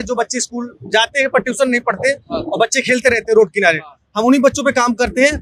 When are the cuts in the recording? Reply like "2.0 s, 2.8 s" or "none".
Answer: none